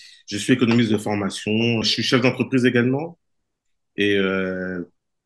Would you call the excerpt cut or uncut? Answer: cut